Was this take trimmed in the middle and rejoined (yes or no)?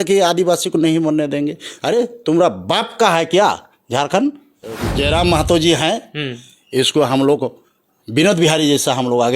yes